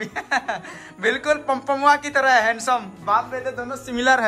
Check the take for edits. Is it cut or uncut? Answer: uncut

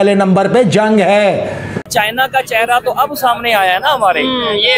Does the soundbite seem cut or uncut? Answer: cut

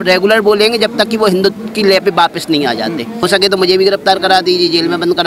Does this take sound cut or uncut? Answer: cut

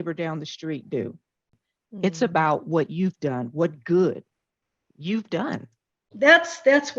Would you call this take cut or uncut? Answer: cut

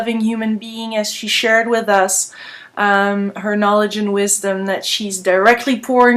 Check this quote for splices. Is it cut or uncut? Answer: uncut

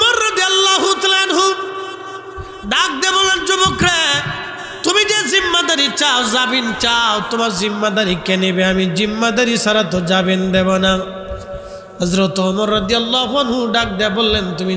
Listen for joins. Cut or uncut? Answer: uncut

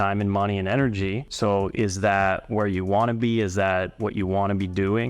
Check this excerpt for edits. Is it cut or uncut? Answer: cut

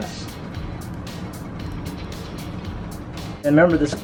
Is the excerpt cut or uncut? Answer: uncut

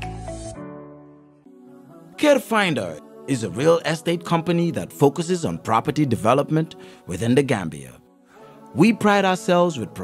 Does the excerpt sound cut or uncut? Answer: cut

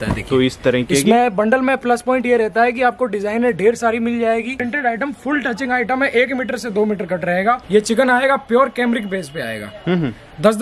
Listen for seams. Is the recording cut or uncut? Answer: cut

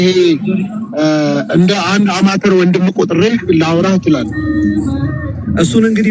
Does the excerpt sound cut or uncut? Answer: uncut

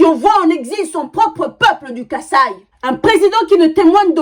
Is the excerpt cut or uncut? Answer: uncut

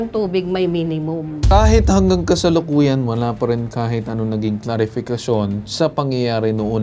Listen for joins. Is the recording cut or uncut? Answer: cut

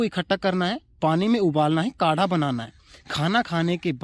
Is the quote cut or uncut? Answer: uncut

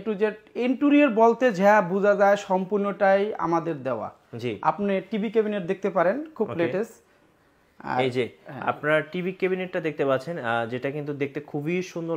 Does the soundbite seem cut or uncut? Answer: uncut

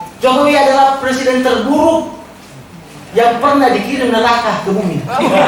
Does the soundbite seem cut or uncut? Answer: uncut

